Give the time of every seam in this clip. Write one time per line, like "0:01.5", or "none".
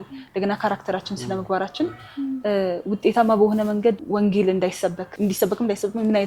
0:04.0
0:05.0